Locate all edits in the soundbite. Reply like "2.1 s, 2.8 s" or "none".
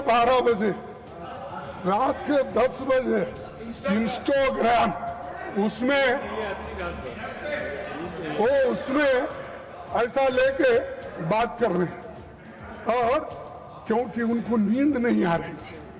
none